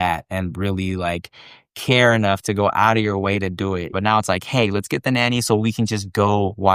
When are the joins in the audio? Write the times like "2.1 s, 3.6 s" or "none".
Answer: 3.9 s